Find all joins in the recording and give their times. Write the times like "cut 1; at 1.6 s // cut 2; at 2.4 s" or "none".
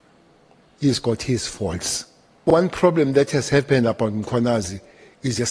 cut 1; at 2.5 s